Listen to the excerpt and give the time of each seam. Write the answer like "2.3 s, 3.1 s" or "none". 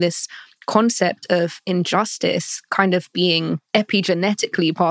3.6 s